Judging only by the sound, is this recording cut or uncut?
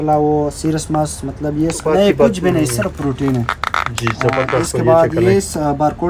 cut